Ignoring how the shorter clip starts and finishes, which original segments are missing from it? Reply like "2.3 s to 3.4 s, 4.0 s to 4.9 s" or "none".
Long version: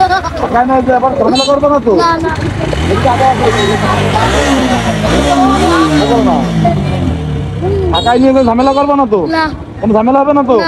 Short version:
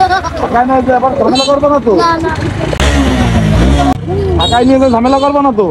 2.8 s to 4.3 s, 5.4 s to 7.5 s